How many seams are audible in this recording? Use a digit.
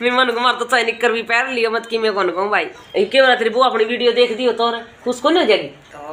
1